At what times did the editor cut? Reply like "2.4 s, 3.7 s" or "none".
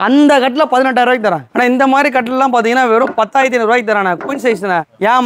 1.5 s

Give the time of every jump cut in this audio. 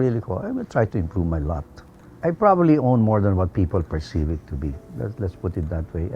1.9 s

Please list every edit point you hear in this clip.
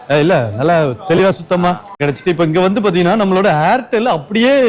2.0 s

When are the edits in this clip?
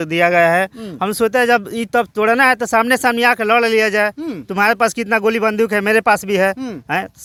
none

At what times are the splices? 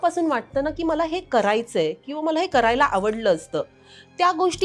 none

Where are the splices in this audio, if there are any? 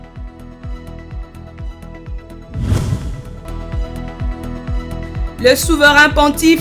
1.2 s

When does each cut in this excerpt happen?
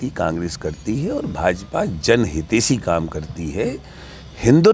none

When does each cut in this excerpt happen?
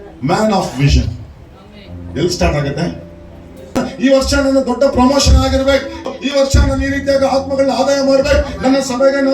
3.9 s, 6.1 s

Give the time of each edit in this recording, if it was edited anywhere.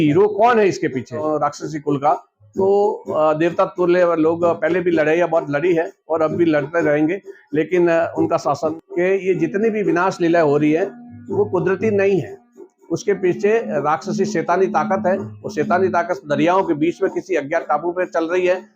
1.2 s, 8.8 s

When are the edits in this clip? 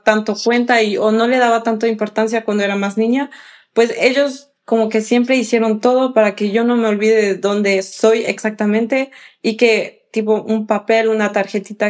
none

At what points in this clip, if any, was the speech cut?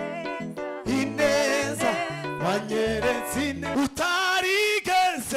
3.7 s

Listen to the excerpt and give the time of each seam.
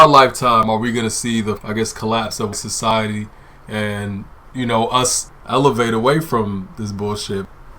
1.6 s, 2.9 s, 5.2 s

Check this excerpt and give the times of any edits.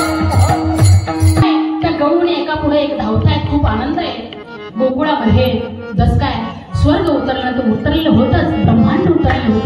1.6 s

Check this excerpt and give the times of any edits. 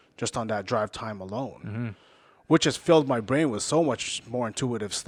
none

